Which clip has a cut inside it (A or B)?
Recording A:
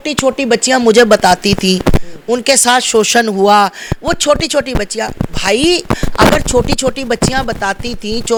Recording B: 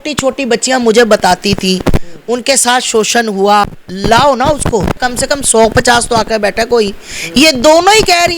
B